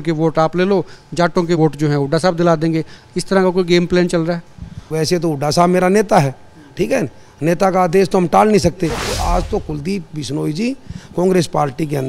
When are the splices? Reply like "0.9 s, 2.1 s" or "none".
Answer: 1.6 s, 4.8 s, 9.1 s